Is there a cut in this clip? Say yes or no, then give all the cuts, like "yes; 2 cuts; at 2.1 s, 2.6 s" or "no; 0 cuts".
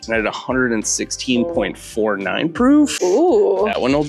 no; 0 cuts